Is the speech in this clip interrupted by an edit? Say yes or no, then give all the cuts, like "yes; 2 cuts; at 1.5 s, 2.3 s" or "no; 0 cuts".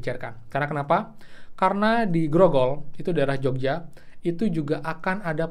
no; 0 cuts